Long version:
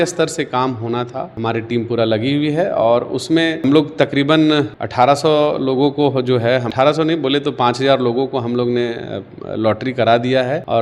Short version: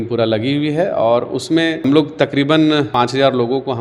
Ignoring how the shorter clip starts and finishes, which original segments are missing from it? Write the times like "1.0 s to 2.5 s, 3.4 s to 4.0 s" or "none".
4.7 s to 7.6 s